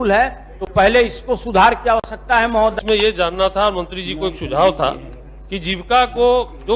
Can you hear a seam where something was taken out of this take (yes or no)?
yes